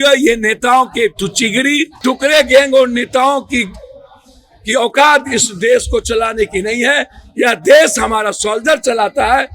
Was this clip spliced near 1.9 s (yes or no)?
yes